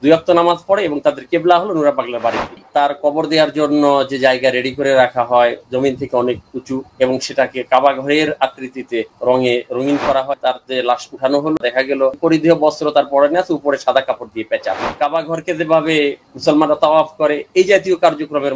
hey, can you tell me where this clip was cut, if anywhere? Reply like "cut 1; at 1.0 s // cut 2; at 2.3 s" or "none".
cut 1; at 2.6 s // cut 2; at 10.3 s // cut 3; at 12.0 s // cut 4; at 15.0 s